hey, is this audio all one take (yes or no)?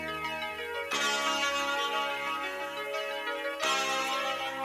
yes